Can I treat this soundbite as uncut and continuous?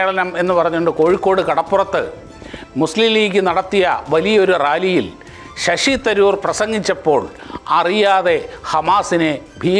yes; 0 cuts

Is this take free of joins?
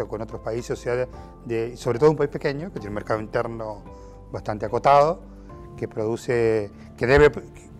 yes; 0 cuts

